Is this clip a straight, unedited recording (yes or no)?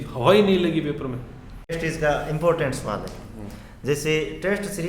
no